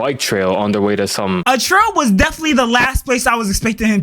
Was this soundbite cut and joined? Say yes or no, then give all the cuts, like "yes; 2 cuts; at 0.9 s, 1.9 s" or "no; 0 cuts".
yes; 1 cut; at 1.4 s